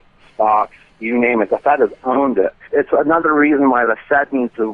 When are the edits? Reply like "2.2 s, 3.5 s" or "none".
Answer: 2.6 s